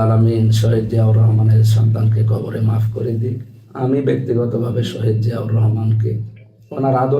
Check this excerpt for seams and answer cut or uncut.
uncut